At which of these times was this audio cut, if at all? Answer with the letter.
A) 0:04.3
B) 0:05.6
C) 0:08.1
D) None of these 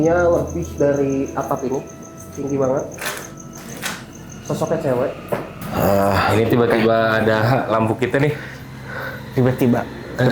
B